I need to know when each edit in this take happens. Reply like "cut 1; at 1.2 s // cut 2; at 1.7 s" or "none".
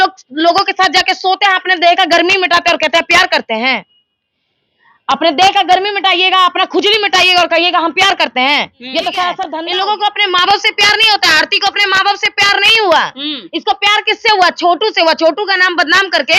cut 1; at 9.4 s